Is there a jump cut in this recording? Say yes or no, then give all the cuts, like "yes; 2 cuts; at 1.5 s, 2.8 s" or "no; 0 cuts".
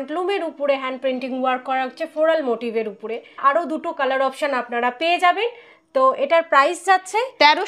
no; 0 cuts